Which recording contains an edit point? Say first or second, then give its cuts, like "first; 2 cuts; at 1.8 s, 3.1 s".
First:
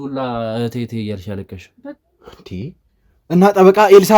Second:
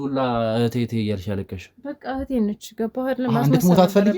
first; 1 cut; at 2.0 s